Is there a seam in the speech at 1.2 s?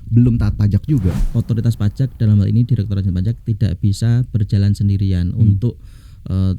yes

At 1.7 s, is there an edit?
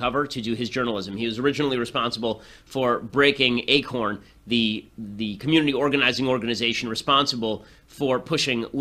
yes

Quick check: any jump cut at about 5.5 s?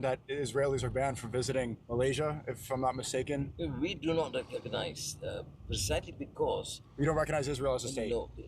no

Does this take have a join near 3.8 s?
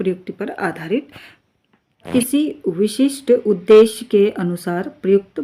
no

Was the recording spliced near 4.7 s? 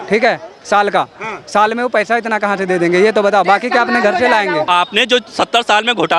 yes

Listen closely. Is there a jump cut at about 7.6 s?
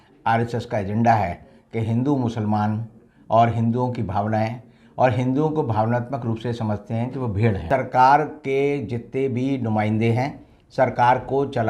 yes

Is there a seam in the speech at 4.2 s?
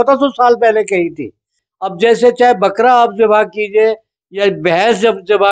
no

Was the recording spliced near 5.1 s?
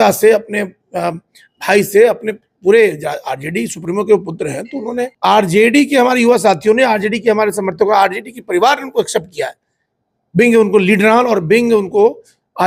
yes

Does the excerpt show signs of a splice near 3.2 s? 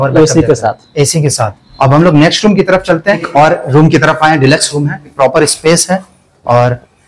yes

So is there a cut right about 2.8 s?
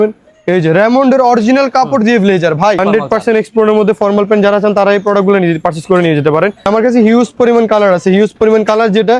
yes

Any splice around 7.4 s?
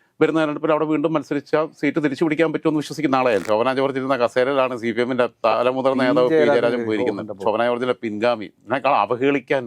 no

